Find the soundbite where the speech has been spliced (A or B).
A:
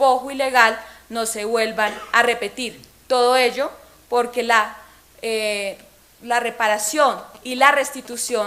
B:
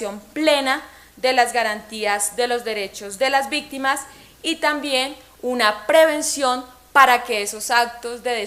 A